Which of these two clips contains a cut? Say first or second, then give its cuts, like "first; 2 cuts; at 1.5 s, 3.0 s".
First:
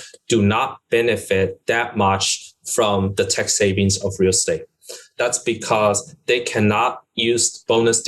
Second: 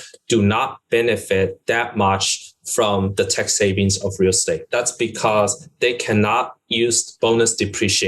second; 1 cut; at 4.6 s